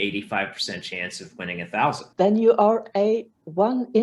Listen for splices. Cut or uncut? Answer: cut